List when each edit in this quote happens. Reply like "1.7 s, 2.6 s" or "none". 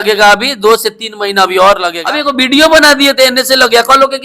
1.9 s